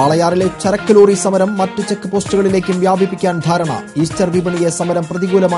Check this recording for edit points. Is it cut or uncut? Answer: uncut